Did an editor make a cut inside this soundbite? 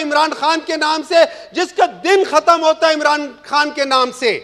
no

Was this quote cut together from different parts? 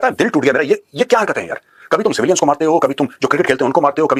no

